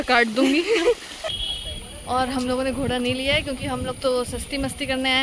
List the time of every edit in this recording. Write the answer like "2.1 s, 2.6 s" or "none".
1.3 s